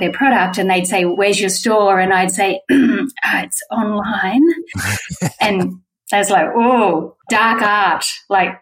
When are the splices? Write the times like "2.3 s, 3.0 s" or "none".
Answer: 1.2 s, 7.2 s